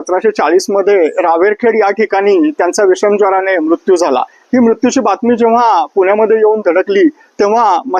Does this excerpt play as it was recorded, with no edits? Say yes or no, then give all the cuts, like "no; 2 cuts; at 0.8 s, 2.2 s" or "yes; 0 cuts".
yes; 0 cuts